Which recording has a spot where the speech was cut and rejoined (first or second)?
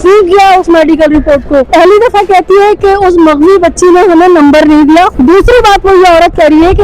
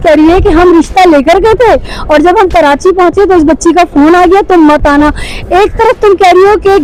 first